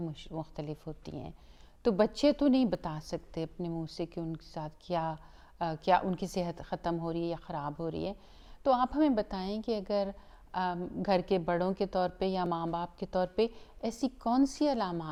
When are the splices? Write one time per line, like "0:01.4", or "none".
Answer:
none